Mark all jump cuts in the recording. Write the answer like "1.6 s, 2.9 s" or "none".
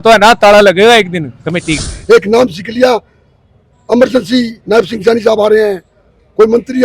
1.8 s